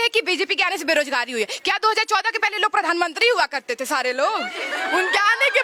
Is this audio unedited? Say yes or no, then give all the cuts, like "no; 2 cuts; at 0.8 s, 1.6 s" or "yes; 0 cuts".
yes; 0 cuts